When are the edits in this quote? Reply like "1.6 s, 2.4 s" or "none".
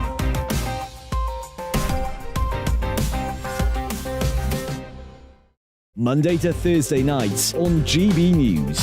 5.7 s